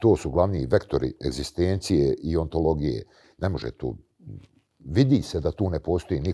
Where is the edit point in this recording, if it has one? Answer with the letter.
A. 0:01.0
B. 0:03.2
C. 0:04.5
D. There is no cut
D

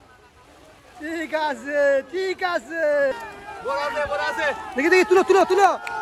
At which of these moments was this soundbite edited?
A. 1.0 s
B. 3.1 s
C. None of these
B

